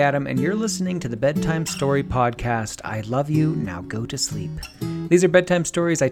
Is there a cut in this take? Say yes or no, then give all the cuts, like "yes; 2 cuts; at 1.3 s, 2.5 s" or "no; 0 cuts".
no; 0 cuts